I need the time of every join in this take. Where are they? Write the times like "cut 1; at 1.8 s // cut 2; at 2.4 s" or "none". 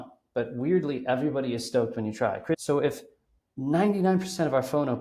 cut 1; at 2.6 s